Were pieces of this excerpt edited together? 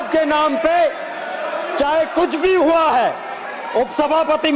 no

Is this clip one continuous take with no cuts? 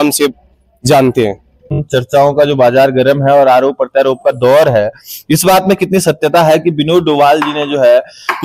no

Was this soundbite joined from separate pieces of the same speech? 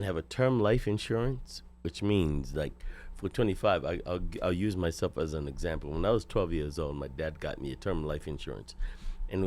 no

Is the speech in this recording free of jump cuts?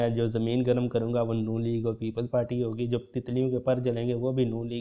yes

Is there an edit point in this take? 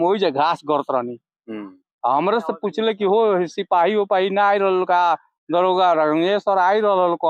no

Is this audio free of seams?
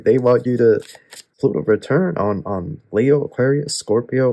no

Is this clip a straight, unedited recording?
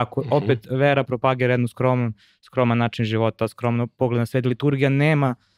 yes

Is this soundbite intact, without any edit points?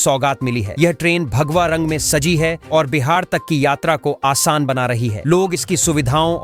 yes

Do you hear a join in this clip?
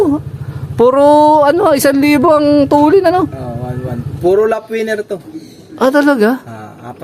no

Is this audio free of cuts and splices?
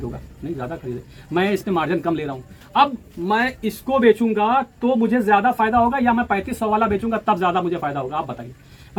yes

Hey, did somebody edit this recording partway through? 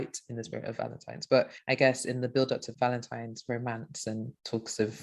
yes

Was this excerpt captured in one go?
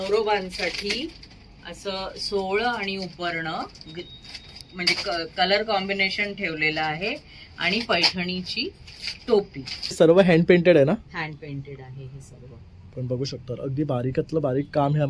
no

